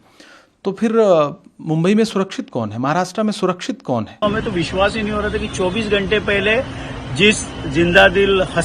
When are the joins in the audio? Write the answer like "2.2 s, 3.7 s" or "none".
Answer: 4.2 s